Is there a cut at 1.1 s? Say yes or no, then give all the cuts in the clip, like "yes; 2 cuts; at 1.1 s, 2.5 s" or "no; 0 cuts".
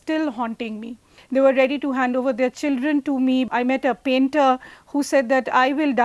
yes; 2 cuts; at 1.1 s, 3.5 s